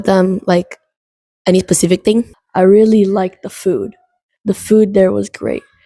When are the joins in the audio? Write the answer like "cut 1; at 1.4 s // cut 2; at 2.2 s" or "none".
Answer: cut 1; at 2.4 s